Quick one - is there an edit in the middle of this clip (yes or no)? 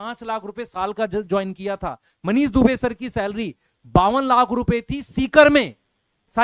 no